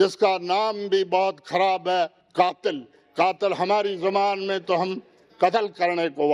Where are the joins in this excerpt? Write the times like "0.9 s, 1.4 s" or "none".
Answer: none